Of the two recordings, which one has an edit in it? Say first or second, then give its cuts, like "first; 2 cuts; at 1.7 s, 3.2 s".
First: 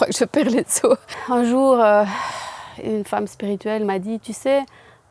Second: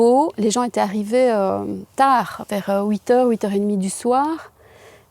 first; 1 cut; at 1.1 s